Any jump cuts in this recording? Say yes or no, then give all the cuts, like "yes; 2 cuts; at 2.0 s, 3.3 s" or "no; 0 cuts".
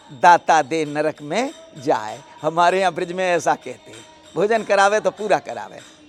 no; 0 cuts